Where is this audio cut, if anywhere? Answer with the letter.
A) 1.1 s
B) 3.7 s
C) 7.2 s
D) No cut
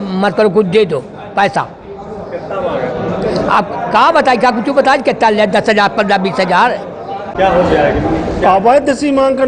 C